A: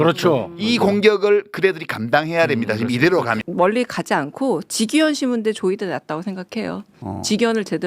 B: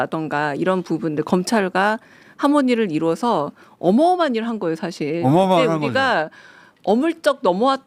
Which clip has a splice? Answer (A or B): A